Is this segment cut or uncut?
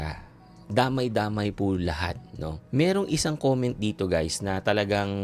cut